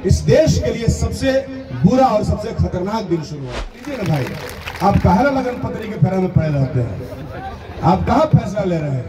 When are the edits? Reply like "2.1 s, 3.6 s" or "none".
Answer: 3.7 s